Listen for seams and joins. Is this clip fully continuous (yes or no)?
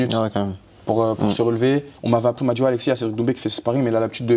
no